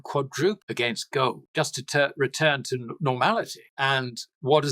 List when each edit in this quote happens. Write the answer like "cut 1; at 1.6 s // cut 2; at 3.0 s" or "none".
cut 1; at 1.3 s // cut 2; at 3.6 s